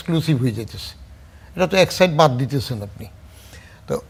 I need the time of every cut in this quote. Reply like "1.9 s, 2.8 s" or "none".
none